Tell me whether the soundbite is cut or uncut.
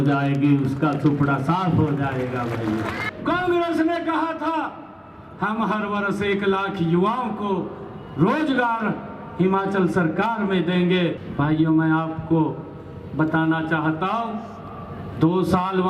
cut